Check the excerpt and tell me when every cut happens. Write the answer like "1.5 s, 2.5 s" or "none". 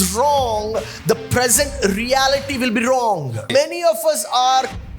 3.5 s